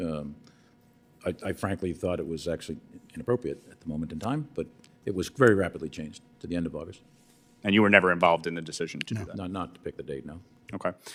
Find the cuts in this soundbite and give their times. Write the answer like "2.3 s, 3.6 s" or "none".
none